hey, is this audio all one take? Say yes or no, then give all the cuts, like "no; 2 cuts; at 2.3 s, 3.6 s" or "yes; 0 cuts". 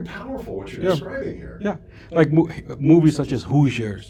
yes; 0 cuts